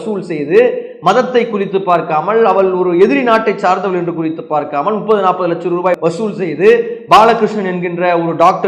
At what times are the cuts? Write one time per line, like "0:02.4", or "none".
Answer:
none